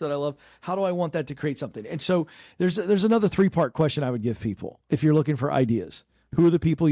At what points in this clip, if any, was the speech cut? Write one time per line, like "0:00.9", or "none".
none